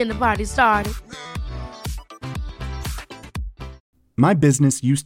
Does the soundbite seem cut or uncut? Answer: cut